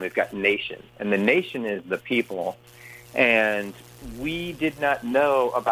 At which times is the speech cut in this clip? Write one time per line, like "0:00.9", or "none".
none